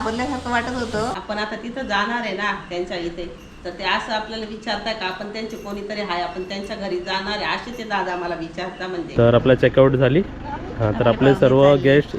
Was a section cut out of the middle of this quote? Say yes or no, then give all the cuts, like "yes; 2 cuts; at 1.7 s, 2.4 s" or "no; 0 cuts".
yes; 2 cuts; at 1.2 s, 9.1 s